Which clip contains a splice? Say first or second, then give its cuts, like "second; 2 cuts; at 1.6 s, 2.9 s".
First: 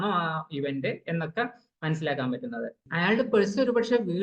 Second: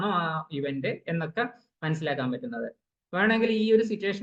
first; 1 cut; at 2.8 s